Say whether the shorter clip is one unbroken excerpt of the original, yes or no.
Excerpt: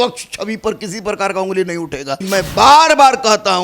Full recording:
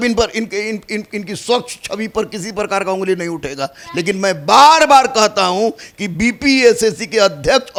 no